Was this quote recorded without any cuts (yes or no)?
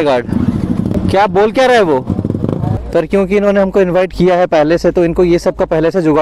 no